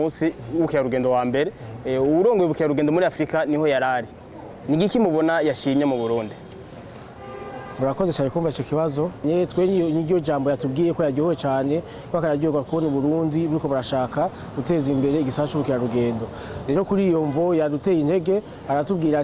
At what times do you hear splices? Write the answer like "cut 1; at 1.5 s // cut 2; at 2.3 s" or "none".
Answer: cut 1; at 9.2 s